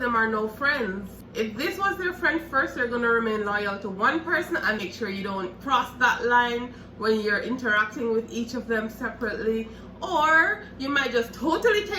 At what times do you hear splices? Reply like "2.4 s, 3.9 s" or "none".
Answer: 1.2 s, 4.8 s